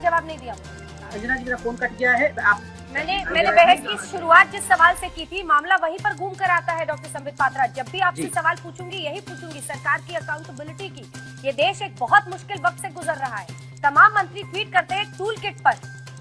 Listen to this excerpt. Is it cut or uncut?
cut